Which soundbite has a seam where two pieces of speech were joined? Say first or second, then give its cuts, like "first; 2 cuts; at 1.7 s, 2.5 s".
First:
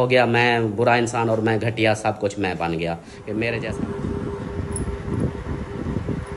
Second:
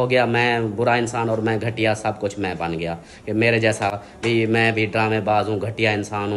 first; 1 cut; at 3.6 s